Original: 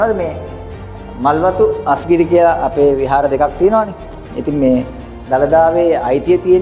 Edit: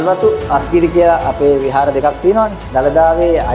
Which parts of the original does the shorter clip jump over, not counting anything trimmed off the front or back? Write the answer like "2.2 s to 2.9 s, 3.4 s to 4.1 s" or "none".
4.0 s to 5.2 s